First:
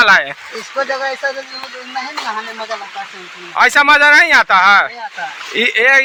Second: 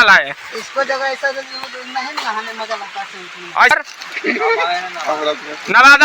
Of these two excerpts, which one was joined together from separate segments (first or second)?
second